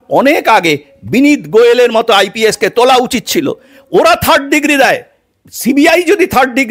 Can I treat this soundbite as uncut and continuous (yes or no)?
yes